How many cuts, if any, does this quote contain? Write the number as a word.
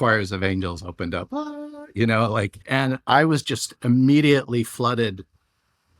one